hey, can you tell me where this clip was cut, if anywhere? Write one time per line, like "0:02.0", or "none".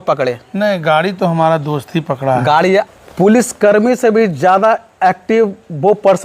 0:02.9